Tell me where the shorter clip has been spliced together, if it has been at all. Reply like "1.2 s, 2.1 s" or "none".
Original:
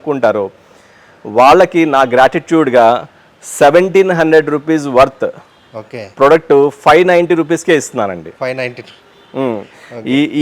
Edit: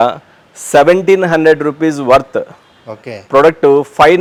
none